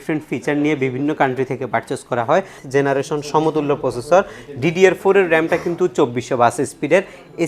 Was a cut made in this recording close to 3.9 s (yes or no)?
no